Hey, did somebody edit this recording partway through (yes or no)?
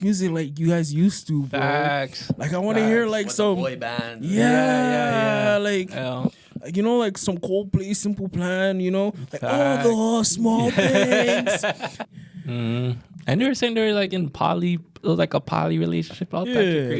yes